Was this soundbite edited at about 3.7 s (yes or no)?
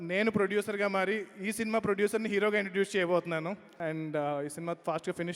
yes